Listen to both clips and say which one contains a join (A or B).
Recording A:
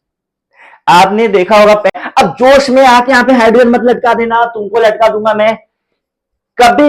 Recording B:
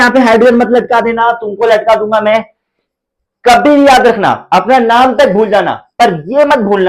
A